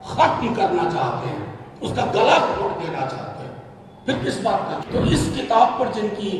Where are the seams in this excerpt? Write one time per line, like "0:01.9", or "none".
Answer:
0:04.8